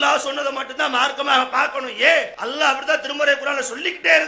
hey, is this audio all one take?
no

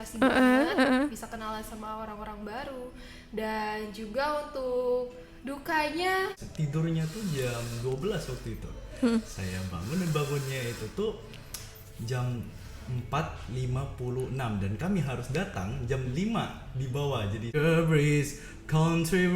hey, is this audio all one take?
no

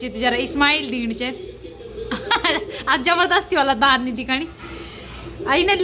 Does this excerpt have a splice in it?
no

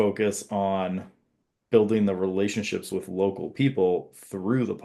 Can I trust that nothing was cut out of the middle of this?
yes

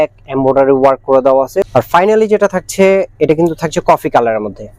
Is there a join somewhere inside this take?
yes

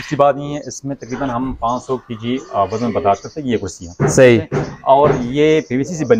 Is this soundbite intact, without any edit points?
yes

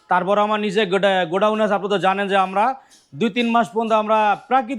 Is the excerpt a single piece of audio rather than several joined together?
yes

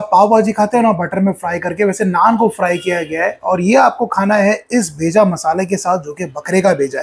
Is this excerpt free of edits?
yes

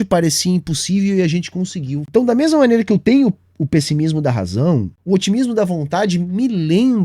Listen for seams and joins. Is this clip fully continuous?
no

